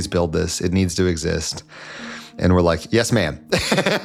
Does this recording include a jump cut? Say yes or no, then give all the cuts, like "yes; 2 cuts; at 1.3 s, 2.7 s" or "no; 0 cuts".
no; 0 cuts